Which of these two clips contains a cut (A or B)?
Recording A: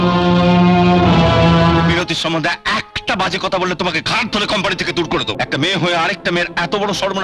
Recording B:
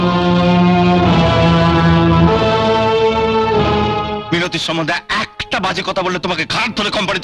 A